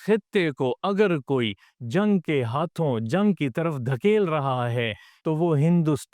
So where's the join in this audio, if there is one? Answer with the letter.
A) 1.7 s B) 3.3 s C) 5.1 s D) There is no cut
C